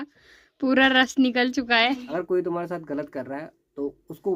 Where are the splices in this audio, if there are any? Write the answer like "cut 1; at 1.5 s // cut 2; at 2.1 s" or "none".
cut 1; at 2.1 s

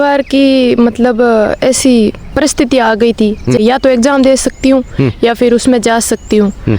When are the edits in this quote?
cut 1; at 3.6 s

